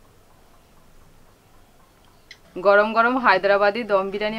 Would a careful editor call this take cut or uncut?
uncut